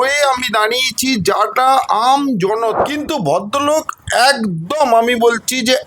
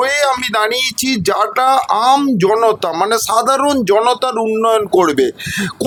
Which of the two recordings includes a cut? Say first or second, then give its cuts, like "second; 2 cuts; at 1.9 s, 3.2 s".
first; 1 cut; at 2.8 s